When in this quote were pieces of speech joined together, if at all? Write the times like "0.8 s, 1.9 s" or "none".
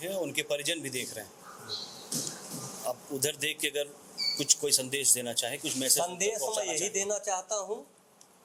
none